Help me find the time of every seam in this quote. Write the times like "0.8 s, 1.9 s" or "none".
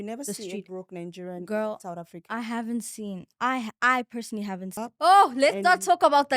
4.8 s